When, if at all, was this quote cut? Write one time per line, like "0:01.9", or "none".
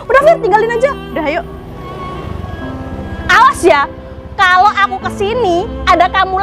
0:01.6

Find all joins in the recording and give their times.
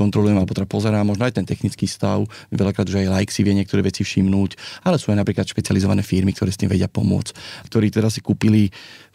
0:07.6

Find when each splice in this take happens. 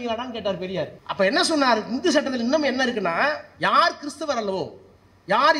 0:01.0

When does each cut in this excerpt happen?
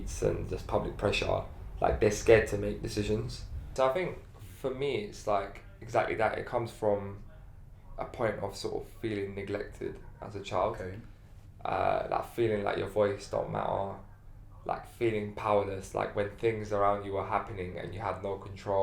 0:03.7

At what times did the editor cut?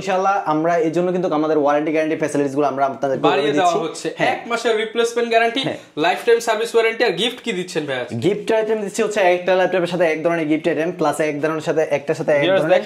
none

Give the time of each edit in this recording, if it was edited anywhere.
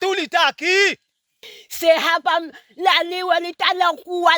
0:01.5

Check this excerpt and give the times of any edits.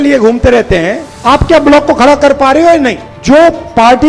0:01.1
0:03.1

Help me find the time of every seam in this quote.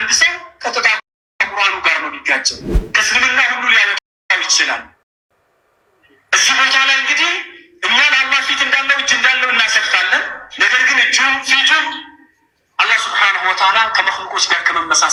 none

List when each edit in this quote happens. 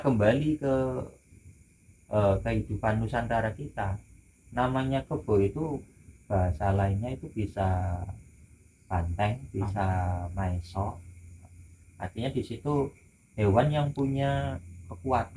none

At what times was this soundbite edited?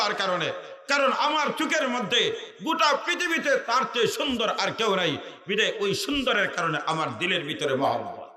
none

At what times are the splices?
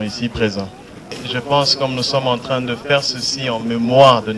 0:01.0

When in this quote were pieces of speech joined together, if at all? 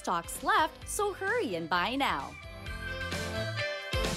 0:02.8

